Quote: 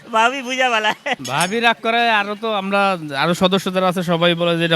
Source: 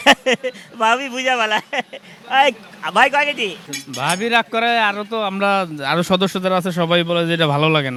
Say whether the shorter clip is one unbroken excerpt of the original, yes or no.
no